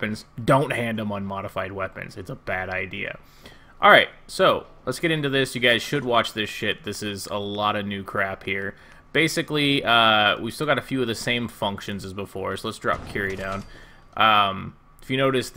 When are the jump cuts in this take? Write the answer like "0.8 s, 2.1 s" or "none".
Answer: 1.9 s